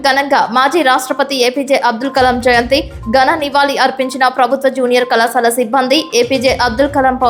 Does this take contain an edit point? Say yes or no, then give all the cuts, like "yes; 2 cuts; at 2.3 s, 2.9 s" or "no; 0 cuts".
no; 0 cuts